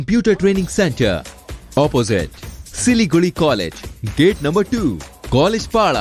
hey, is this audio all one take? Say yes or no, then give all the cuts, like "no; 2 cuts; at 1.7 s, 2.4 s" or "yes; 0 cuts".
yes; 0 cuts